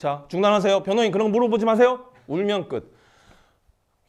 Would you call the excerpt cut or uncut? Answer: uncut